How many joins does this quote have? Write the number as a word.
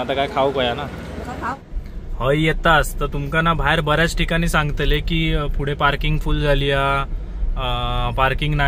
one